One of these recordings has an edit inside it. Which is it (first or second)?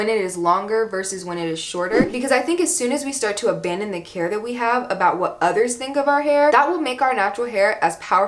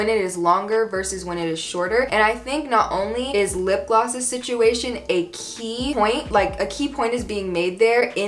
first